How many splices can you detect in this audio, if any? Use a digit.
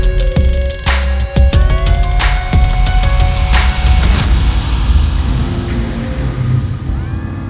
0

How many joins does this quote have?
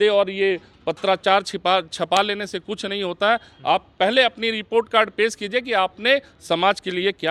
0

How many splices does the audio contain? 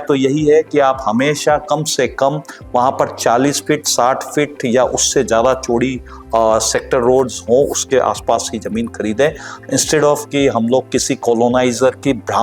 0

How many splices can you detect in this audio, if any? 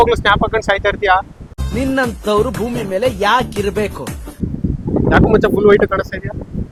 0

